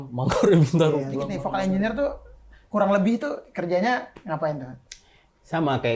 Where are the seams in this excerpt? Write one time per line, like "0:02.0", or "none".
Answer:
0:01.4